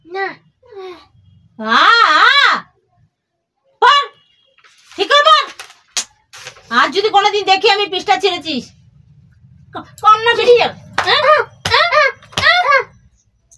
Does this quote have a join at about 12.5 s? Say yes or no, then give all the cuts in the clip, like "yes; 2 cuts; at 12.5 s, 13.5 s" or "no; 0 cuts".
yes; 1 cut; at 12.5 s